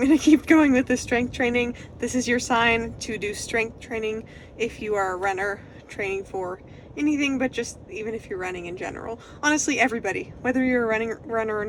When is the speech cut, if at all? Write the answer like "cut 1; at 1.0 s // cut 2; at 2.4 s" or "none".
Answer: none